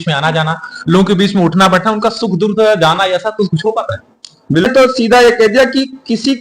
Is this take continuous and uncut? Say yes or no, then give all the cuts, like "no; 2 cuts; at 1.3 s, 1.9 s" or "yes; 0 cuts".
no; 1 cut; at 4.7 s